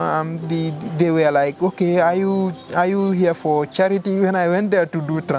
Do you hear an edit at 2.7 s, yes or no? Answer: no